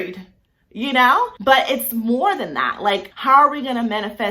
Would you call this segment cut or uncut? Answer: cut